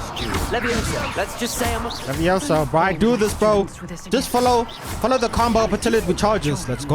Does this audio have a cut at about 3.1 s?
no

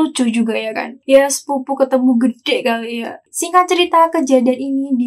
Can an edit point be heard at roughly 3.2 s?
yes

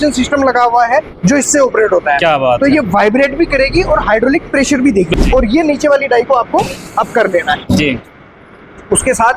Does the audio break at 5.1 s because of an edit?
yes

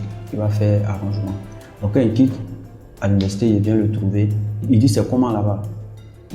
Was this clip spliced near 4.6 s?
yes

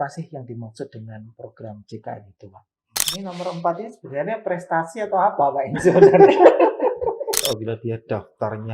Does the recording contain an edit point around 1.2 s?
no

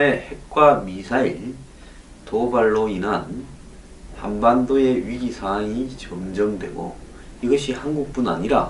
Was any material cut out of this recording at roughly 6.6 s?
yes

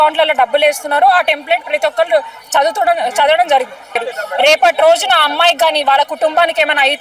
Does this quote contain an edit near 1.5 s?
no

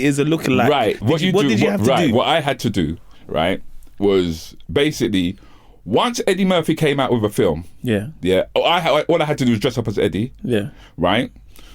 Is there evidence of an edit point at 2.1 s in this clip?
no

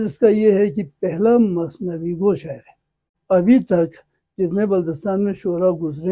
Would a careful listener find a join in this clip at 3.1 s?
yes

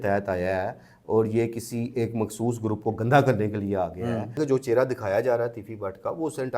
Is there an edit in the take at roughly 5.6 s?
no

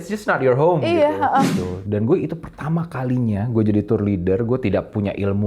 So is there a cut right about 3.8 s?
no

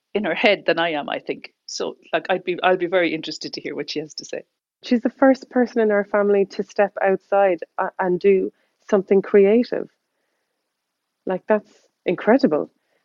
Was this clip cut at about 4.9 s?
yes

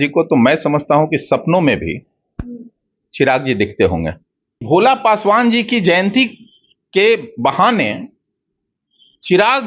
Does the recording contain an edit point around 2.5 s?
no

